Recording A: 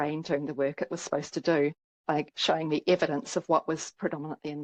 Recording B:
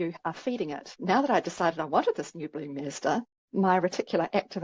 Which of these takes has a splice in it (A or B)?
B